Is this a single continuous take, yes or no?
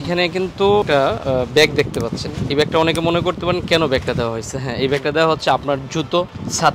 no